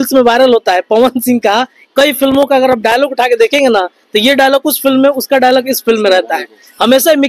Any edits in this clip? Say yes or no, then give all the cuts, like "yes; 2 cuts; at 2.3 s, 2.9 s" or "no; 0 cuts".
no; 0 cuts